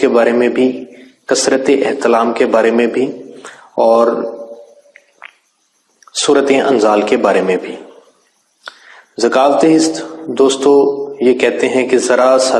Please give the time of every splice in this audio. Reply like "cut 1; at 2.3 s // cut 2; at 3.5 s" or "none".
cut 1; at 10.7 s